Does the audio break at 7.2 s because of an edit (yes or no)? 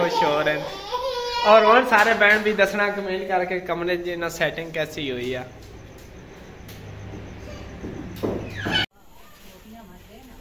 no